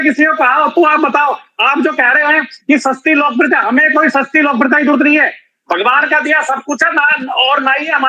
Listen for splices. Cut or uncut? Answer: uncut